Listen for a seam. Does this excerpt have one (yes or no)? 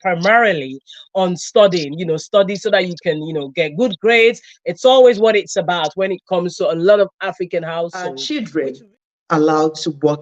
yes